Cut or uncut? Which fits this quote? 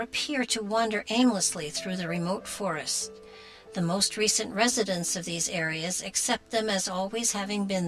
cut